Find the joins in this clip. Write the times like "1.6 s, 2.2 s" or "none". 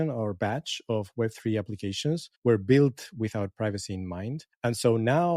2.3 s, 4.5 s